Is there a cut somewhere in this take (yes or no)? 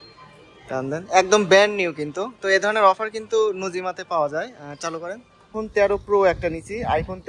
yes